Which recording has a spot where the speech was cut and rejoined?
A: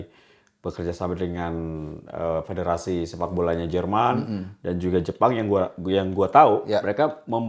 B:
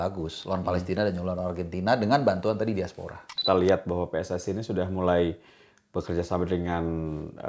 B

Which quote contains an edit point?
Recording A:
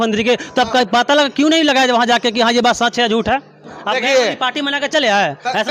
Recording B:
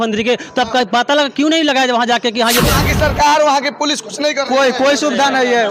B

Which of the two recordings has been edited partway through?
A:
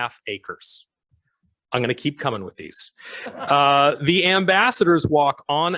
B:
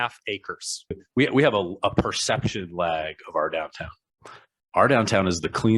B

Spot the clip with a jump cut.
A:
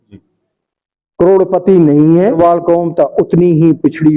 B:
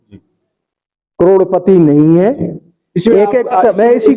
A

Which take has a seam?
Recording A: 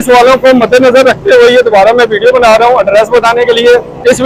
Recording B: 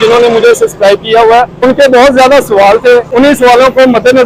B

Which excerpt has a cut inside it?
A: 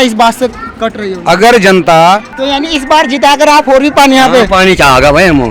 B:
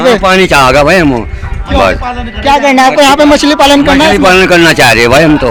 A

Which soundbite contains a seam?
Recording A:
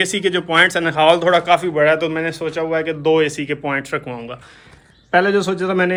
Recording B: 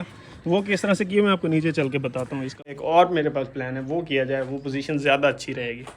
B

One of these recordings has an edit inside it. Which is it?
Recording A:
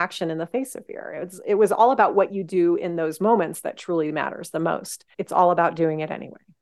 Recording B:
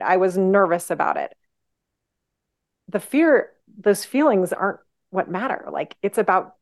A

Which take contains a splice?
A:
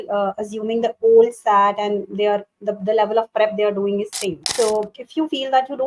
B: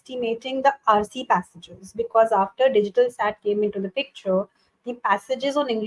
A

